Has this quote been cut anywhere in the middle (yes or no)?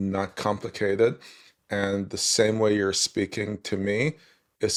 no